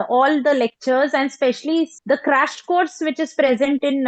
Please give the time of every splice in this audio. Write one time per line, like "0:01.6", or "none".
0:01.9